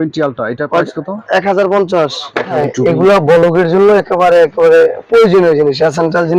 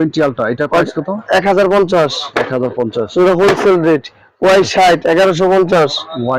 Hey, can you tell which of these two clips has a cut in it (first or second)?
first